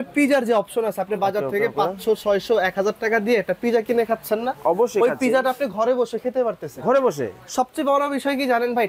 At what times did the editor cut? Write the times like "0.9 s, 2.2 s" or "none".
none